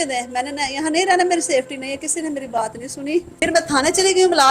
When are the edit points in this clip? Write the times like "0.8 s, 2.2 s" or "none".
3.4 s